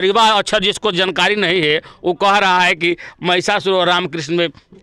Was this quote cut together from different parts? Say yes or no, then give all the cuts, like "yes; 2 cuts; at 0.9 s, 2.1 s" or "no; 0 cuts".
no; 0 cuts